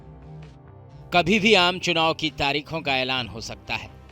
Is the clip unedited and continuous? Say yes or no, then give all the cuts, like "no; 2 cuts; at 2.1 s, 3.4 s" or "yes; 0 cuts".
no; 1 cut; at 1.1 s